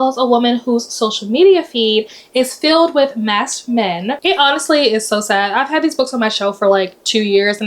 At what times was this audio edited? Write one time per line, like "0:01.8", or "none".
0:04.1

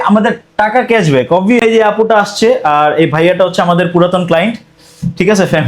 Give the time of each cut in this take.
0:01.6

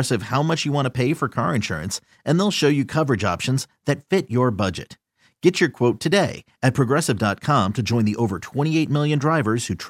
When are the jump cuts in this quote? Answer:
none

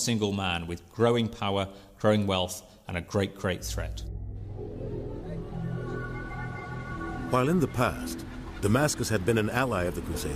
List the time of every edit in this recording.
0:04.4

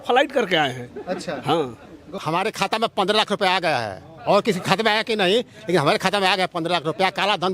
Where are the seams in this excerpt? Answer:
0:02.1

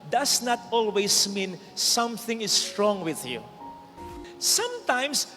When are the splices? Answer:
0:04.1

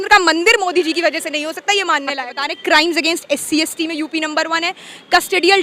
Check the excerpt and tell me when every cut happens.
0:02.5

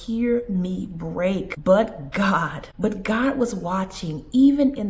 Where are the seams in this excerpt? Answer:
0:01.5
0:02.6

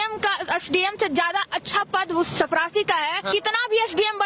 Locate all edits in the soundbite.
0:03.3

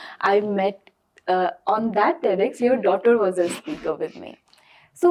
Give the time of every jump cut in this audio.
none

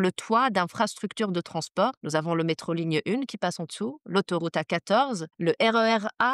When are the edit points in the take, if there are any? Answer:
0:02.0
0:05.3

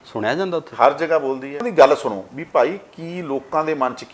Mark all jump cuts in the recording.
0:01.7

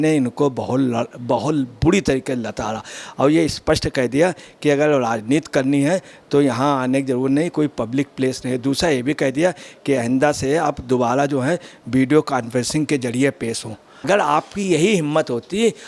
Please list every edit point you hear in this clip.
0:14.0

